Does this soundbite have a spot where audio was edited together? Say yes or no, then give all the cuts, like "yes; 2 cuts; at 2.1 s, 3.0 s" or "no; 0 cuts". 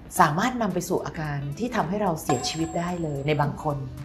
no; 0 cuts